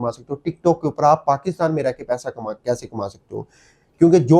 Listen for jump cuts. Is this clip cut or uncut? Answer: uncut